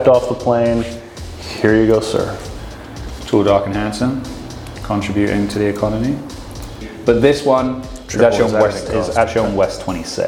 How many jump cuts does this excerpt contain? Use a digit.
1